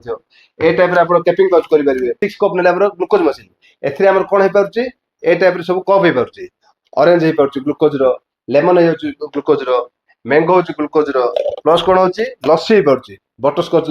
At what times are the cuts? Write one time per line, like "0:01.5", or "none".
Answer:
0:02.3